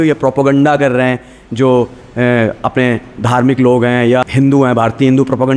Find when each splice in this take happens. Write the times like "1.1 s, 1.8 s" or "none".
4.2 s